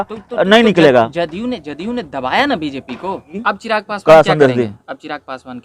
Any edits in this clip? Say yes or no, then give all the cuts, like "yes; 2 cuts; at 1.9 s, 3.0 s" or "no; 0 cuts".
yes; 1 cut; at 3.5 s